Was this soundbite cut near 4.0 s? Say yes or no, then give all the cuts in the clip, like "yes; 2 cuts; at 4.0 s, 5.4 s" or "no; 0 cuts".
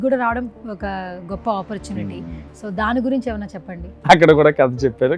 yes; 1 cut; at 4.0 s